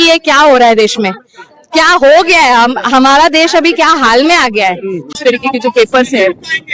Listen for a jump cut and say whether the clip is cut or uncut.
cut